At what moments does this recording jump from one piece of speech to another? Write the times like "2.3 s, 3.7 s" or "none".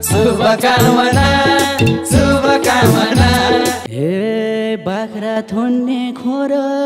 3.8 s